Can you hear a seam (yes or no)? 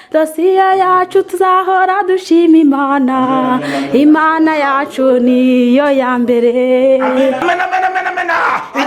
yes